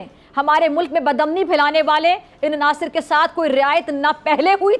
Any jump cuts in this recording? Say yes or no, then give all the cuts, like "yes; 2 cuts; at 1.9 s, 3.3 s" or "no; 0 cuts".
no; 0 cuts